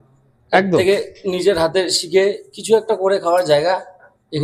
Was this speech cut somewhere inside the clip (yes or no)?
no